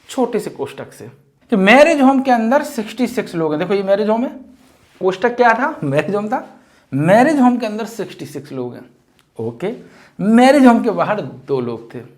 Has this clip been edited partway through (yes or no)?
yes